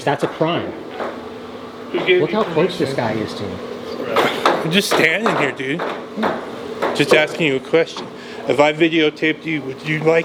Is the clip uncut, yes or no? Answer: yes